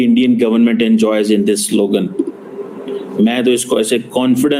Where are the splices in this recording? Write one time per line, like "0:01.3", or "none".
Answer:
none